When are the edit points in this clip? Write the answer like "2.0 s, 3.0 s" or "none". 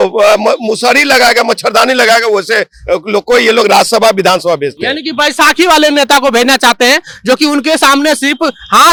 none